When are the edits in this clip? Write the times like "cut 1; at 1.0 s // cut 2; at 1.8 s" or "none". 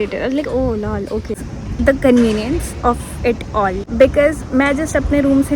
cut 1; at 1.5 s // cut 2; at 3.8 s